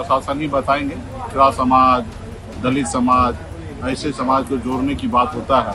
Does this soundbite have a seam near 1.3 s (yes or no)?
yes